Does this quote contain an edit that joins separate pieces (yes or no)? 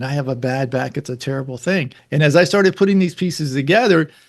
yes